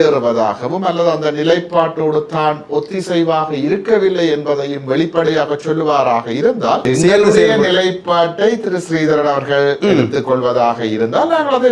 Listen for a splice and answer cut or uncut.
cut